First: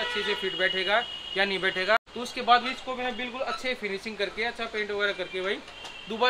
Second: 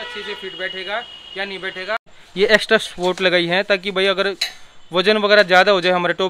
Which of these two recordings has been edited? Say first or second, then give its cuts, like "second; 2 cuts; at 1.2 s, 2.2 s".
second; 1 cut; at 2.2 s